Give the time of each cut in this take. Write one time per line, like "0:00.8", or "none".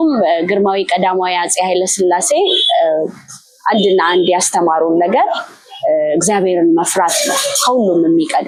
none